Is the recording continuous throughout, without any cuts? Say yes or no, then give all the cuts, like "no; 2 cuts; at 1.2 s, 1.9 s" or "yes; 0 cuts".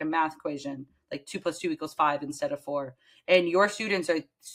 yes; 0 cuts